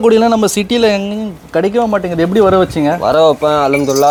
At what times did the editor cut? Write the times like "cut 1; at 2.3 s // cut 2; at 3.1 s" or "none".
none